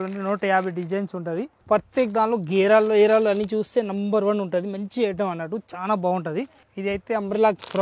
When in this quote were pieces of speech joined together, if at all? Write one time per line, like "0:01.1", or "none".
0:01.5
0:06.6